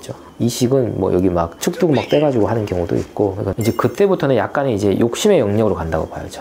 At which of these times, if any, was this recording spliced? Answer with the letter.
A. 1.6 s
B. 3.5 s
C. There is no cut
B